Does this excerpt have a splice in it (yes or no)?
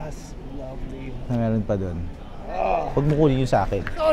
no